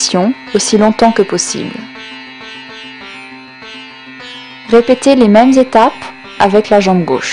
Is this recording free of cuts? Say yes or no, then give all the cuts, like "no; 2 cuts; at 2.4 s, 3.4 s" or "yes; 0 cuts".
yes; 0 cuts